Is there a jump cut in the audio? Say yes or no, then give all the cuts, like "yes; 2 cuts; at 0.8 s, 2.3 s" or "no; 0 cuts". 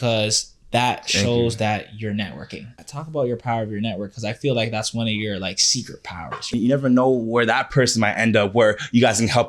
yes; 2 cuts; at 2.9 s, 6.5 s